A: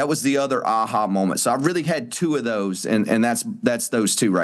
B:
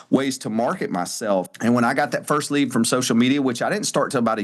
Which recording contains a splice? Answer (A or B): B